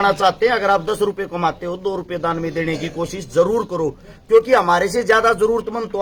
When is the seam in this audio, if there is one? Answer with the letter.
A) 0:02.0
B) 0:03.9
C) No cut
C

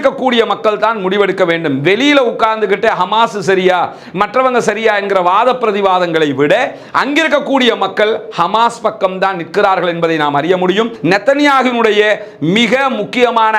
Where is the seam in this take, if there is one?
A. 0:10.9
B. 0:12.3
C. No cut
A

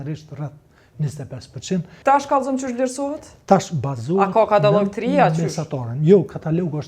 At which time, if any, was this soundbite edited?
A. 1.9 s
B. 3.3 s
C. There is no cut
A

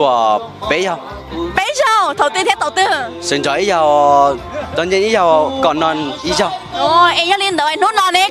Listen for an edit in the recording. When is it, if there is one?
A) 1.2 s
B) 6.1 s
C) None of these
A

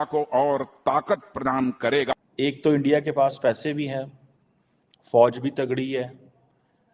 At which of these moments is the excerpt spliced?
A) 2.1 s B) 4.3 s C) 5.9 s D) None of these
A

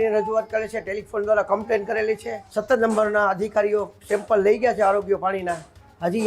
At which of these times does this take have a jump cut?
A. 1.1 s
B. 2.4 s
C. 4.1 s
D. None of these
B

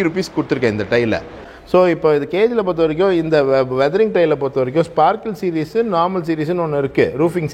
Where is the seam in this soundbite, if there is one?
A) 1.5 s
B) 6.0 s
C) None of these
A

